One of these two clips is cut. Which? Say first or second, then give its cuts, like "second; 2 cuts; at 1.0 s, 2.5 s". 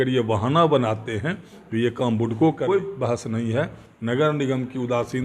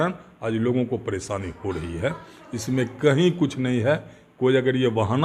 first; 1 cut; at 2.7 s